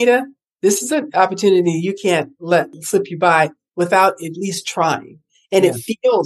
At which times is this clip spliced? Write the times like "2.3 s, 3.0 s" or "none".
2.8 s